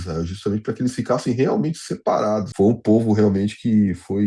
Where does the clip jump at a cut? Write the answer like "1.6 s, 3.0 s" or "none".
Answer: 2.5 s